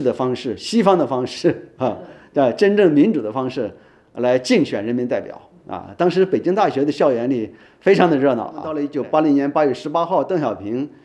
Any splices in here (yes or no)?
yes